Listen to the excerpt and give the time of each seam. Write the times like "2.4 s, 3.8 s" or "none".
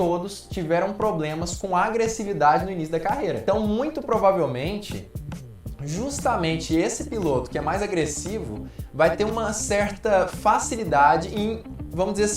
3.4 s